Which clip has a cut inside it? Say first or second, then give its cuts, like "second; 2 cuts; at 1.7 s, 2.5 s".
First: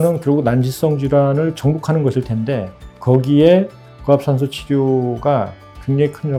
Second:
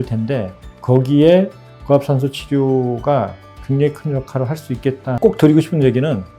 second; 1 cut; at 5.1 s